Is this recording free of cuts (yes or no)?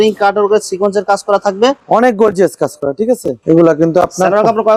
yes